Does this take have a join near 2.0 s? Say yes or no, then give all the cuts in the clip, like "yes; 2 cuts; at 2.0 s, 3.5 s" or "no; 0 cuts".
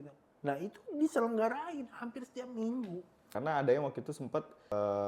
no; 1 cut; at 3.3 s